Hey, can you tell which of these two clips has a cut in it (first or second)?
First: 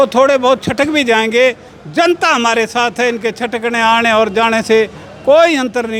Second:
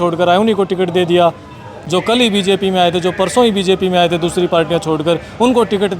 second